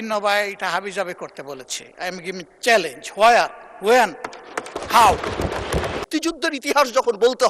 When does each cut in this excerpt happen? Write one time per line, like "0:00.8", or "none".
0:06.0